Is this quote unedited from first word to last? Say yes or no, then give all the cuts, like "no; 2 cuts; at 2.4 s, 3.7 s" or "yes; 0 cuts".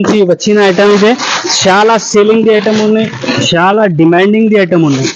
yes; 0 cuts